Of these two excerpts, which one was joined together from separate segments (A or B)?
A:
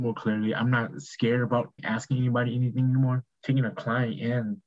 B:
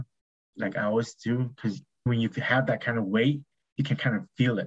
A